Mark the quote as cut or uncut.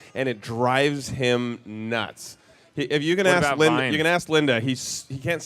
cut